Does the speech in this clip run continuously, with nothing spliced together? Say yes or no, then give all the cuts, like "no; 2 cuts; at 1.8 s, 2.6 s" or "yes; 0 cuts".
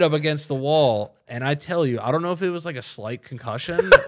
yes; 0 cuts